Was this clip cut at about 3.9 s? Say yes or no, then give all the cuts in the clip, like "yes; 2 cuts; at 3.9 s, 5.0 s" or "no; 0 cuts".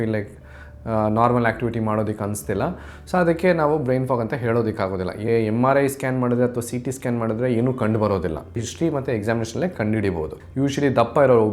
no; 3 cuts; at 5.3 s, 8.6 s, 10.3 s